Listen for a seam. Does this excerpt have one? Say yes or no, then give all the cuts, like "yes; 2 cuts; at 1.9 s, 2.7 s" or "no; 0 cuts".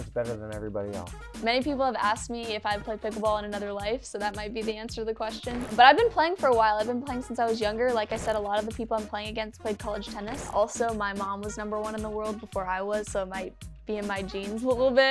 yes; 3 cuts; at 1.3 s, 5.7 s, 10.5 s